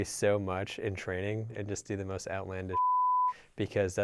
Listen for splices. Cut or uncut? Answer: cut